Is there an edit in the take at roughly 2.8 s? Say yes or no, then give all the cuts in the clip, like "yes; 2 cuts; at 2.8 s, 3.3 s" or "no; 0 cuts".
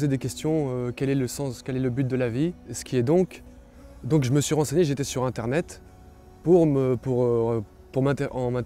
yes; 1 cut; at 2.8 s